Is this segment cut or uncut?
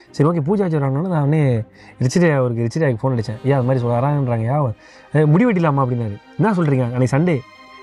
uncut